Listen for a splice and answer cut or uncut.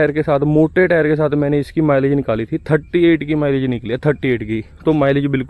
uncut